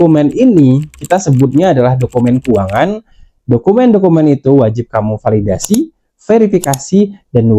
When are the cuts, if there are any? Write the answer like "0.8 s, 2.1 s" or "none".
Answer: none

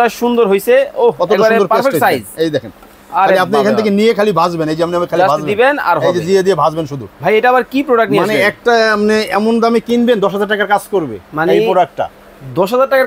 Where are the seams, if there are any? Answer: 7.1 s

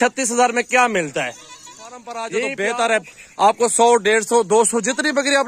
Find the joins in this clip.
2.3 s

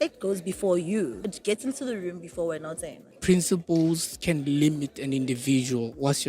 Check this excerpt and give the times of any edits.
1.3 s, 3.1 s

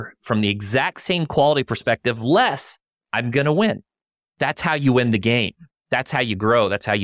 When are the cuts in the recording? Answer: 4.3 s

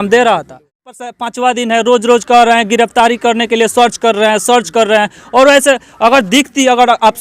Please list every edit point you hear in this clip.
0.9 s

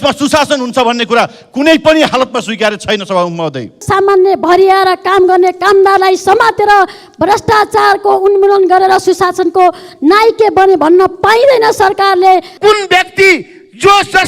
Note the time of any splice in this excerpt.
3.8 s, 12.5 s

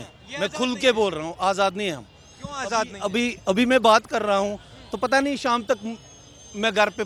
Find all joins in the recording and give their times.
none

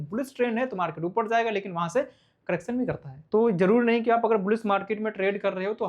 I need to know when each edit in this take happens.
3.3 s

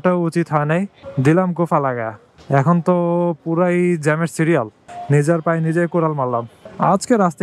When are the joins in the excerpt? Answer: 4.8 s

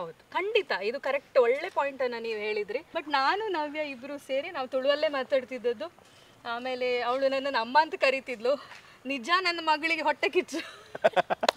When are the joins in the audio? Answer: 2.9 s

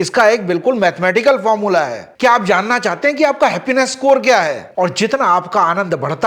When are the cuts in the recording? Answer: 4.6 s

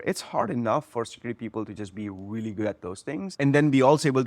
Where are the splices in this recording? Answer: 3.3 s

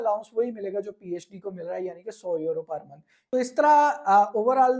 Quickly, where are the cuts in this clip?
3.2 s

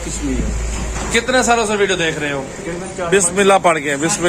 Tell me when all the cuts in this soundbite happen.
2.9 s

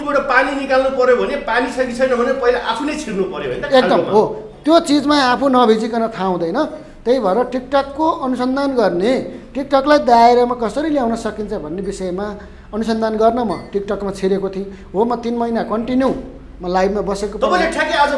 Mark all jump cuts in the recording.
none

